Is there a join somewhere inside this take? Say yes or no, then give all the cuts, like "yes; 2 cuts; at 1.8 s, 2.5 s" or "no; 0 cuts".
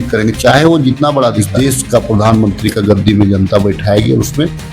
yes; 1 cut; at 1.4 s